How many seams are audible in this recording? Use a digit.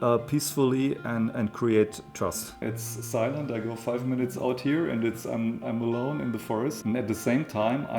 1